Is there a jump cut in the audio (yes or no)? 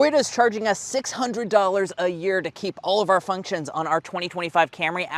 no